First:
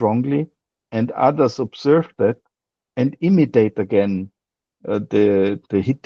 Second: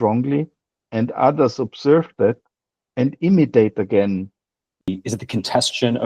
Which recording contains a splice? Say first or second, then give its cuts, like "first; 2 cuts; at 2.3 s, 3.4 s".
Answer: second; 1 cut; at 4.9 s